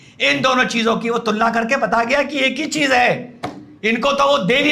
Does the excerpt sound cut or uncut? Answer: uncut